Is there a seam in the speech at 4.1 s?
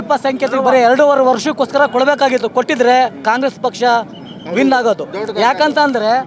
no; 0 cuts

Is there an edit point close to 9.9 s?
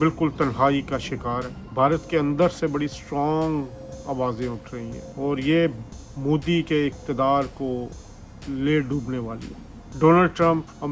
yes; 2 cuts; at 1.6 s, 9.9 s

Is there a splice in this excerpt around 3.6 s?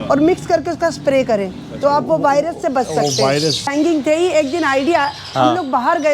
yes; 1 cut; at 3.6 s

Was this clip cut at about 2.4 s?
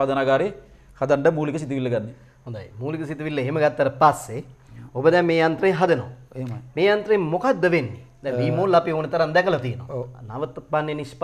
no; 0 cuts

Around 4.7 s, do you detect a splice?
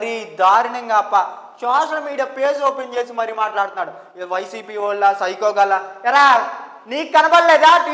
no; 0 cuts

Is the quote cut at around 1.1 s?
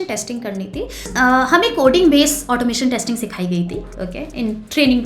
yes; 1 cut; at 1.1 s

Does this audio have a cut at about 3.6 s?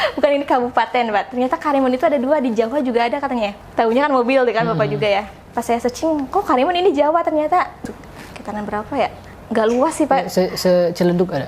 yes; 2 cuts; at 3.6 s, 7.8 s

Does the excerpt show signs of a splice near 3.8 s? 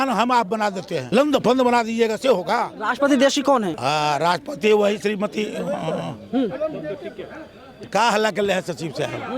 yes; 3 cuts; at 0.9 s, 2.8 s, 3.8 s

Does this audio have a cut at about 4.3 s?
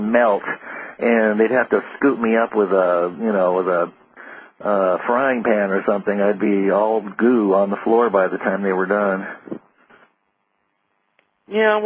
yes; 1 cut; at 4.3 s

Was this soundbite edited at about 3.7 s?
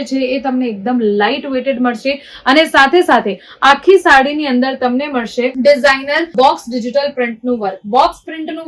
no; 0 cuts

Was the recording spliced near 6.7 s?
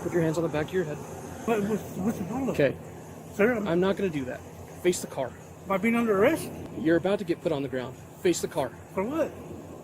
yes; 3 cuts; at 1.4 s, 5.5 s, 6.7 s

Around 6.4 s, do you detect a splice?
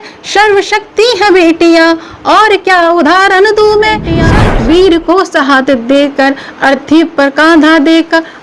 no; 1 cut; at 4.3 s

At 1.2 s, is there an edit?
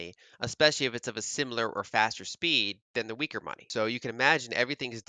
no; 1 cut; at 3.7 s

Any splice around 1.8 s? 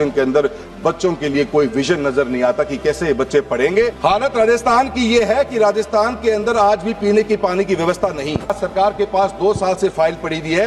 no; 2 cuts; at 4.0 s, 8.6 s

